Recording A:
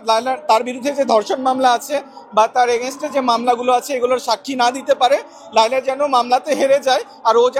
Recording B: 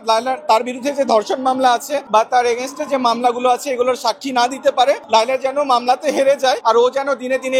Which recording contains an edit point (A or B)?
B